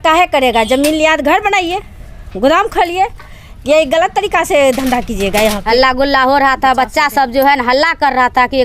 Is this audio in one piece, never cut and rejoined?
no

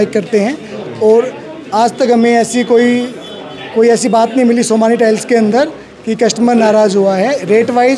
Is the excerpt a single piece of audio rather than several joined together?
yes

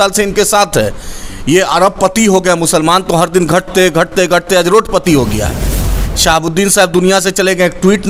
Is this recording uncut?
yes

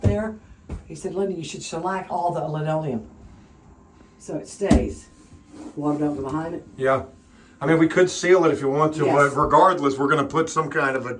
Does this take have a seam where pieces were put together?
no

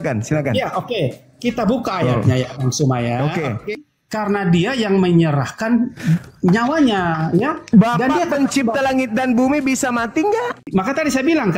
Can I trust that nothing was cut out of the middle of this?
no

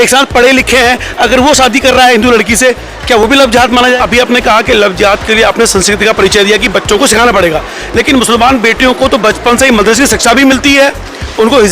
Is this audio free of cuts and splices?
no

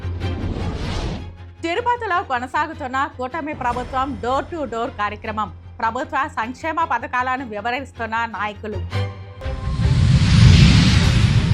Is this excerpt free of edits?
no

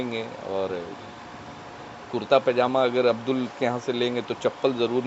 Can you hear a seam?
no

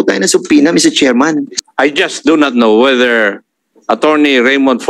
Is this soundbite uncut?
no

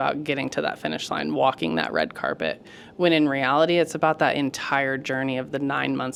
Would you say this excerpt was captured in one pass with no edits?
yes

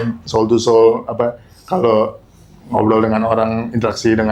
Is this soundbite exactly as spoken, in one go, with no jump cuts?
yes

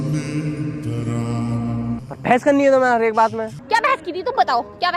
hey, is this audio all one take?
no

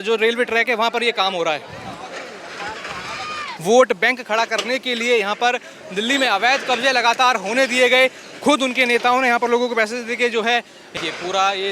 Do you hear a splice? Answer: yes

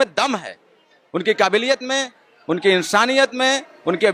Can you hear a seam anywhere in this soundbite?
no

